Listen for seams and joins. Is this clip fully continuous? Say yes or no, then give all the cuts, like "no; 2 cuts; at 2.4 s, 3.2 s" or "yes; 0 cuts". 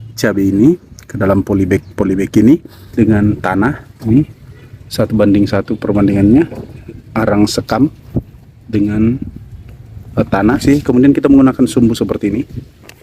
no; 2 cuts; at 2.8 s, 10.6 s